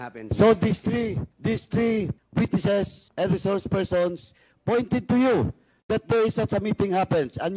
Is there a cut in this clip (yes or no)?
yes